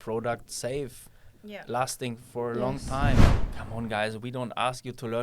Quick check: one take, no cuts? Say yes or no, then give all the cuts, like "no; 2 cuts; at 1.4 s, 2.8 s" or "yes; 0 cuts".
no; 1 cut; at 3.3 s